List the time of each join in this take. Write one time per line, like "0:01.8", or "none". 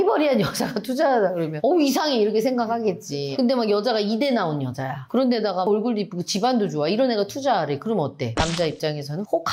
none